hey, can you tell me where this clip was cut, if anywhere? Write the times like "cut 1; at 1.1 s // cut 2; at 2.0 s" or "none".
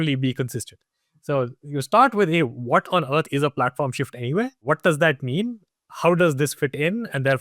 cut 1; at 4.6 s